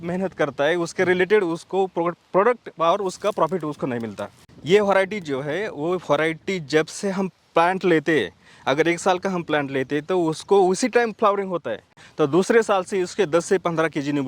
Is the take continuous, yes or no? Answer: no